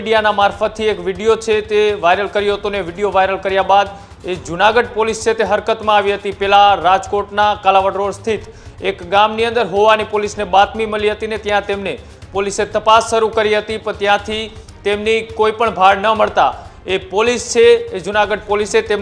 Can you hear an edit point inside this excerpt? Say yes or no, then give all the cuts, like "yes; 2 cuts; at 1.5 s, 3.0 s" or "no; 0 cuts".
no; 0 cuts